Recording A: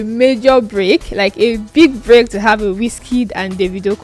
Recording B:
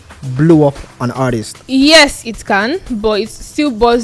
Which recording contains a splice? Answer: B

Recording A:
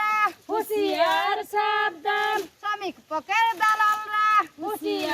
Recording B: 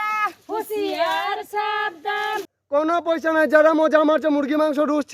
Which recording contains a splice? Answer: B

